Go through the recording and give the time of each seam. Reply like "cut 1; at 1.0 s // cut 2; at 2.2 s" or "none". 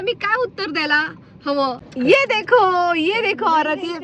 cut 1; at 1.8 s